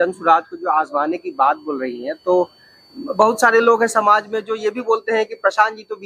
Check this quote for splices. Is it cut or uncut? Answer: uncut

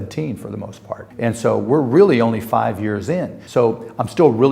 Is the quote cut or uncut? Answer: cut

